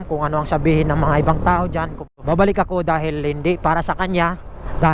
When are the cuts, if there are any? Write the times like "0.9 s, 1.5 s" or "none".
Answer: 2.1 s

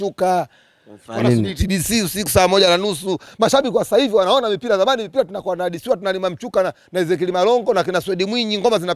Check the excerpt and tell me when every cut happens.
none

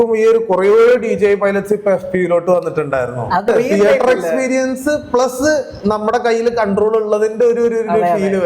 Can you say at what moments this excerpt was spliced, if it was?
3.5 s

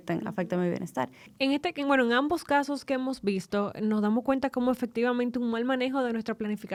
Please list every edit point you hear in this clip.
none

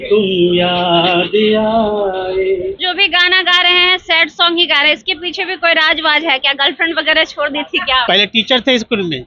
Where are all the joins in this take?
2.9 s, 8.1 s

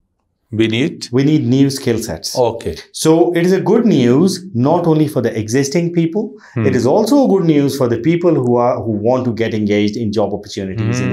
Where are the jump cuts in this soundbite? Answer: none

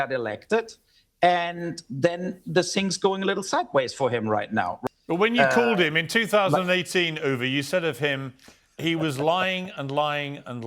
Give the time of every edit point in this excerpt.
4.8 s

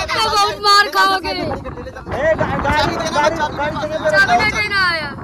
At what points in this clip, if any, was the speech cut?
none

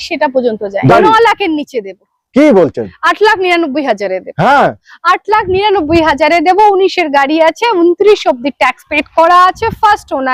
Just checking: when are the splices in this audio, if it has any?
0.9 s

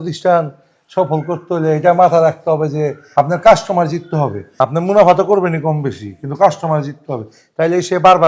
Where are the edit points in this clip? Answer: 3.0 s, 4.4 s

